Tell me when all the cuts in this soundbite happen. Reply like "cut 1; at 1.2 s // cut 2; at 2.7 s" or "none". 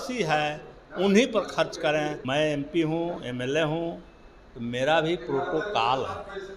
cut 1; at 2.2 s